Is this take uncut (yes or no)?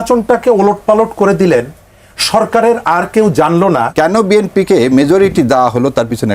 no